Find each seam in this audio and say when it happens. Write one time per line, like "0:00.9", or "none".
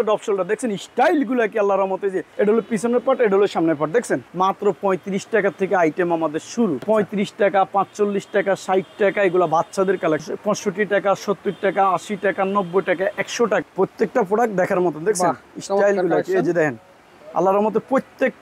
0:02.2
0:04.3
0:06.8
0:10.3
0:13.6